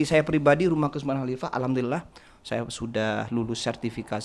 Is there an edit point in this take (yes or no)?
no